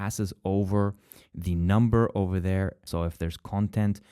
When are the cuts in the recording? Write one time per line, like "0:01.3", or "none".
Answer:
0:02.8